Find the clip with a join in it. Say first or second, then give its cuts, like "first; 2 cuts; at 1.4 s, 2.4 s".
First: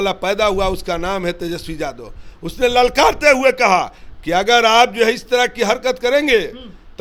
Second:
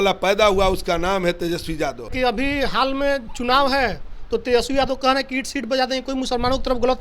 second; 1 cut; at 2.1 s